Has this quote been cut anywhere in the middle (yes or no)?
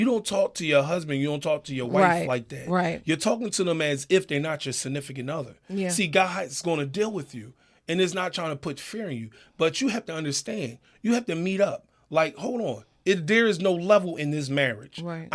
no